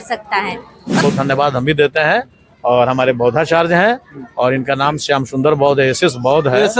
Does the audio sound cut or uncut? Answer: cut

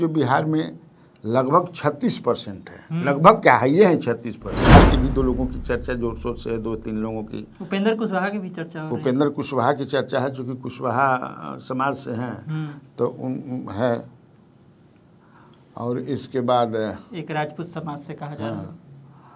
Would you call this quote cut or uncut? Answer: cut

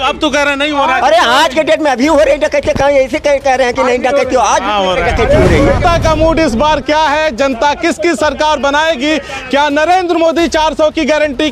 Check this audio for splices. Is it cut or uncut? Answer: cut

